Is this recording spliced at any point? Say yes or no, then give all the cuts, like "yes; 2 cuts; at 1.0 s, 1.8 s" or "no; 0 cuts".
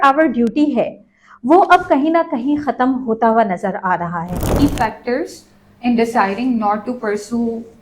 yes; 1 cut; at 4.6 s